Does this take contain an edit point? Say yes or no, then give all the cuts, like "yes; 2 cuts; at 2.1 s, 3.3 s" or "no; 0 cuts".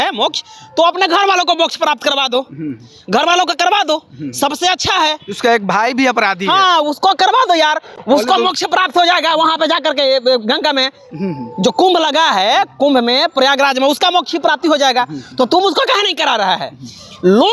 no; 0 cuts